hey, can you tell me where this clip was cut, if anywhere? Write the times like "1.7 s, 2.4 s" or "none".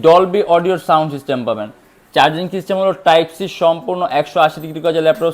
none